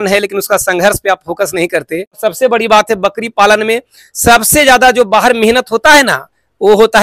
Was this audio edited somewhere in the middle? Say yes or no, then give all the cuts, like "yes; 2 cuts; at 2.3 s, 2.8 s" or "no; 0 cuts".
yes; 1 cut; at 2.2 s